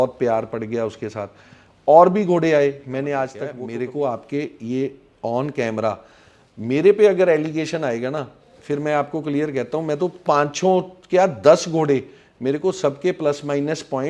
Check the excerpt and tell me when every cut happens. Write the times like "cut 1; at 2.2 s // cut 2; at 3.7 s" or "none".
cut 1; at 3.4 s